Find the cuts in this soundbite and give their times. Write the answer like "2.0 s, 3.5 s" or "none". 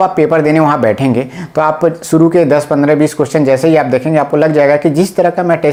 none